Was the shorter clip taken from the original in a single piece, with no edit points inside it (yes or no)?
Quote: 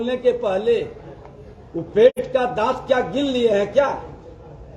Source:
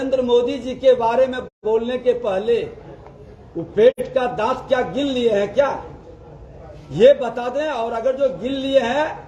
yes